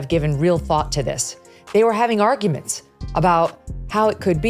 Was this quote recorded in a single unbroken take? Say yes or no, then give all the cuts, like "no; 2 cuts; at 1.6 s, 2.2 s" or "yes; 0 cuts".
yes; 0 cuts